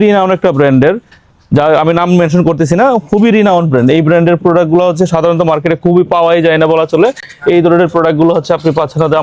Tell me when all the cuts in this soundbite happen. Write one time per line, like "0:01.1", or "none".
none